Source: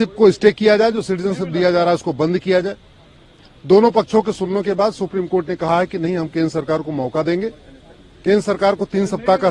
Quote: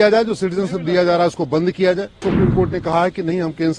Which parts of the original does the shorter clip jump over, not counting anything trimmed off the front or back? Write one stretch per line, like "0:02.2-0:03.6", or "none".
0:02.9-0:05.0